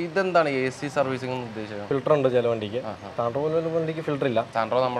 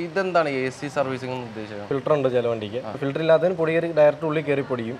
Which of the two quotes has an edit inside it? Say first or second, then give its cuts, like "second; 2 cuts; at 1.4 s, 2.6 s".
second; 1 cut; at 3.0 s